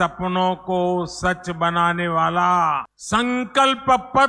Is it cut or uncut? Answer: cut